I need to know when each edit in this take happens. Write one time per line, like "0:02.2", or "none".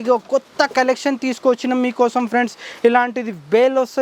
none

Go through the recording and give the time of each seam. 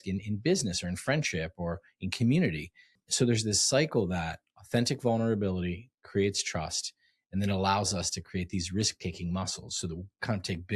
0:03.0

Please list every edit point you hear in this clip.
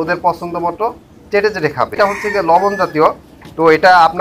0:01.9

